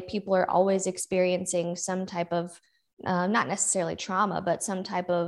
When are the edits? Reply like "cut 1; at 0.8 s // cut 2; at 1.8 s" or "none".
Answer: none